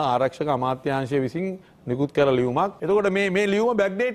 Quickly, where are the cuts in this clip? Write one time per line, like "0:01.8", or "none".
0:02.8